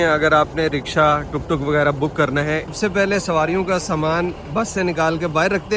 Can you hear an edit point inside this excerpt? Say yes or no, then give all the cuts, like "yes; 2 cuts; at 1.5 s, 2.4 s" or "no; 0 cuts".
yes; 1 cut; at 2.7 s